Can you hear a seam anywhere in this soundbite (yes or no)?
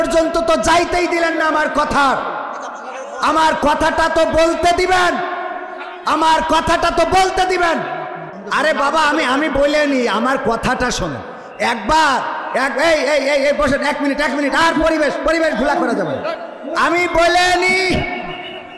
yes